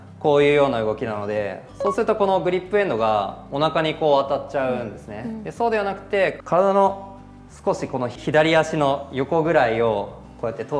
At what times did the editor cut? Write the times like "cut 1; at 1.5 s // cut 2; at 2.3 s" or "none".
cut 1; at 6.4 s